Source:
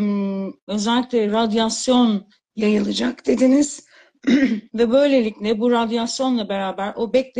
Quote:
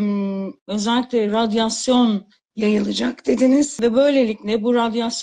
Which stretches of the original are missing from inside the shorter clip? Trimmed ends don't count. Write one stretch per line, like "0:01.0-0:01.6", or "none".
0:03.7-0:04.7

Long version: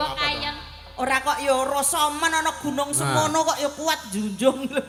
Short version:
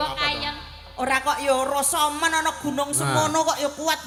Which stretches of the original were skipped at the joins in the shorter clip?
none

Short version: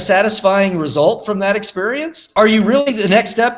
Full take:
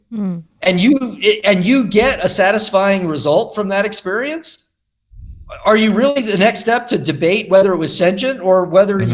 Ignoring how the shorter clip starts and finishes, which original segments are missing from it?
0:04.5-0:05.5

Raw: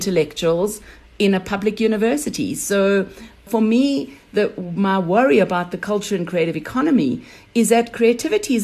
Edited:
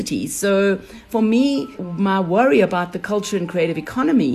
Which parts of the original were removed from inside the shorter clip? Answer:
0:03.2-0:03.3
0:04.2-0:04.6

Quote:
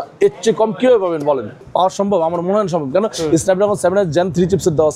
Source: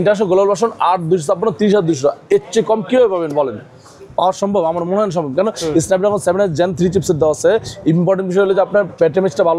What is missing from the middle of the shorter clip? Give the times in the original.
0:03.6-0:04.0

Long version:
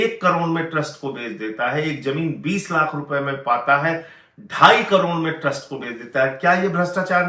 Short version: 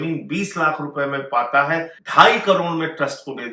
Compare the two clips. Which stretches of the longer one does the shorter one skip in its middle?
0:04.1-0:04.4

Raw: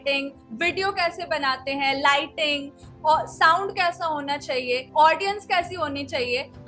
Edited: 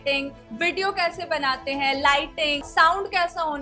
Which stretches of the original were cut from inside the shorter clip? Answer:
0:02.7-0:03.3

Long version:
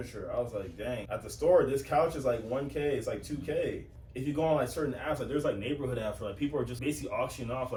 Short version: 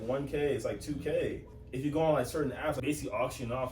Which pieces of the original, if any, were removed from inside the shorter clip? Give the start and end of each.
0:05.2-0:06.8

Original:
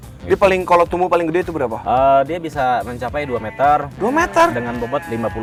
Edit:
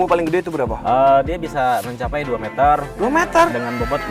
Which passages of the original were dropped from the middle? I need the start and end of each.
none

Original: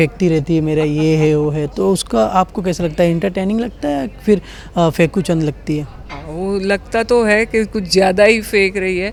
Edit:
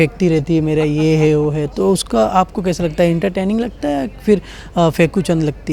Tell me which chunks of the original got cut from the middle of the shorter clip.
none

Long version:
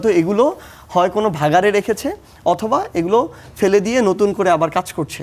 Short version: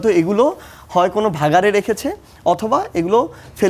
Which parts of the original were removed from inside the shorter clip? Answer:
none

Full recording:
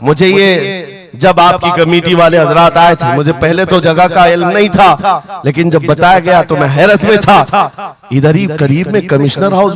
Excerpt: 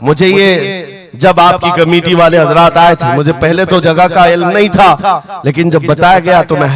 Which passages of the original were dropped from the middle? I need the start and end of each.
none

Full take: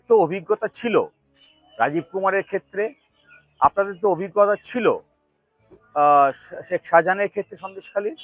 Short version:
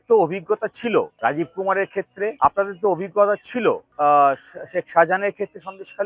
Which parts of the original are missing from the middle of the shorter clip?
0:01.1-0:01.7
0:02.9-0:03.5
0:05.1-0:05.8

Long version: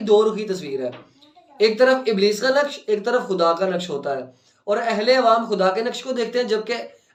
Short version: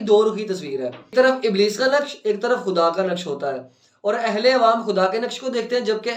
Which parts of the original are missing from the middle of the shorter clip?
0:01.1-0:01.7

